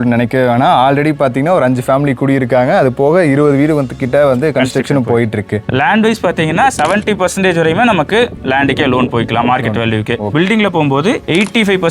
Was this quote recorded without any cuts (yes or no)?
no